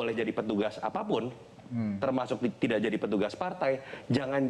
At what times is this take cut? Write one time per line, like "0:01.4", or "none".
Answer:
none